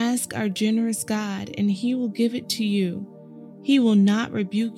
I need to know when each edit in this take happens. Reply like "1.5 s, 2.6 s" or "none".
none